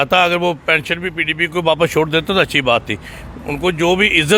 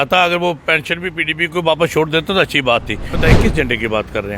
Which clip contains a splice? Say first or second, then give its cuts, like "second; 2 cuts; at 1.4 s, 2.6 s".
second; 1 cut; at 3.2 s